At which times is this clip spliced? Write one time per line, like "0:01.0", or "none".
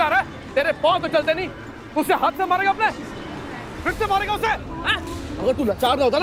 none